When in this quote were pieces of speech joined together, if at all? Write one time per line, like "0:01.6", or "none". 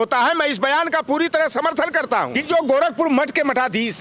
0:02.4